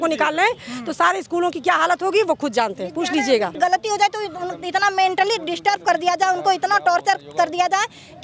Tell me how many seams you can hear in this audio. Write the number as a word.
one